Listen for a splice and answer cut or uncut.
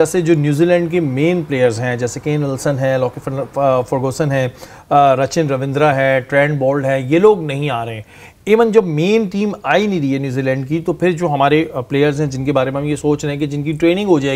uncut